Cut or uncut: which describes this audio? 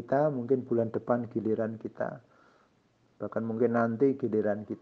uncut